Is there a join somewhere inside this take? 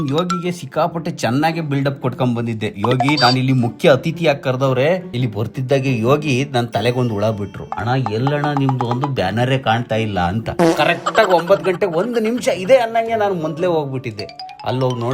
yes; 2 cuts; at 5.1 s, 10.4 s

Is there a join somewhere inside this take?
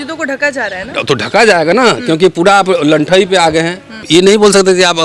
yes; 1 cut; at 4.0 s

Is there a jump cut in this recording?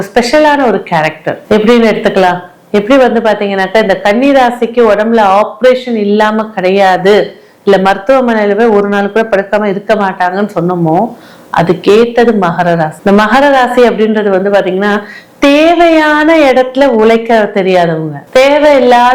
no; 0 cuts

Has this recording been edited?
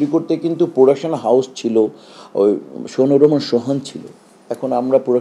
no; 0 cuts

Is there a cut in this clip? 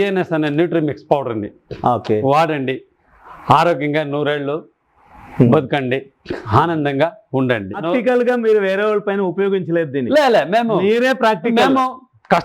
yes; 1 cut; at 7.8 s

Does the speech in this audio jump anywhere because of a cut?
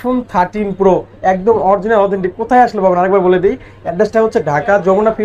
no; 0 cuts

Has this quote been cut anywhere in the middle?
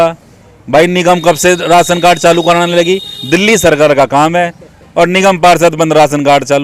no; 0 cuts

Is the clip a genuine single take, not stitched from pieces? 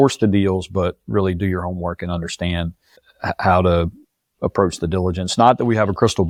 yes; 0 cuts

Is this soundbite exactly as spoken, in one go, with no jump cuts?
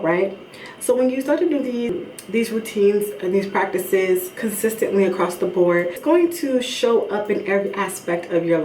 no; 2 cuts; at 2.0 s, 6.0 s

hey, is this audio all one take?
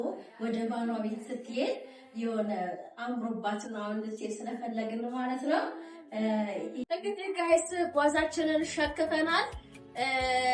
no; 1 cut; at 6.8 s

